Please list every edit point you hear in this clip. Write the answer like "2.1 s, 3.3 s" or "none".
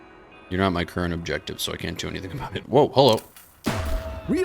2.6 s